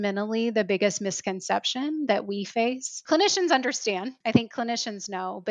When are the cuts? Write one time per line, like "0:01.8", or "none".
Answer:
0:02.9
0:04.1